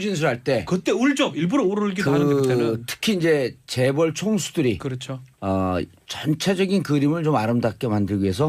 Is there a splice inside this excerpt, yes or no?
yes